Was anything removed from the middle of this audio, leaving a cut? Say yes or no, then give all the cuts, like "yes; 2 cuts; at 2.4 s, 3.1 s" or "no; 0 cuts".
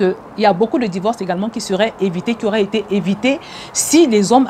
no; 0 cuts